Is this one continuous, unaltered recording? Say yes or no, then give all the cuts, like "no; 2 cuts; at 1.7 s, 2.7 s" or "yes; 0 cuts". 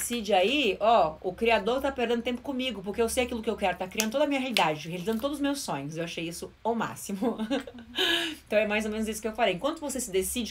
yes; 0 cuts